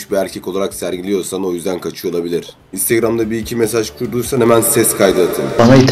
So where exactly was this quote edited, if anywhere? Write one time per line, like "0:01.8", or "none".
0:02.7